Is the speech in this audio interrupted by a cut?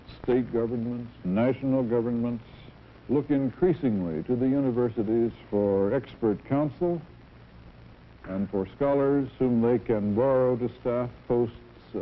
yes; 1 cut; at 11.0 s

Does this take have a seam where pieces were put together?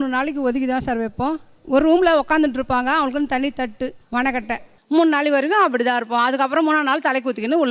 no; 0 cuts

